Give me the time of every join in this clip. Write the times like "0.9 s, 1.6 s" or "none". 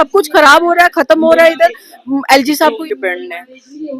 2.8 s